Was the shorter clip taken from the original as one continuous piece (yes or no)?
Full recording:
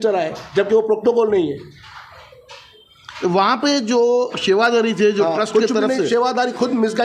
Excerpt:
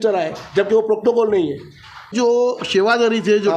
no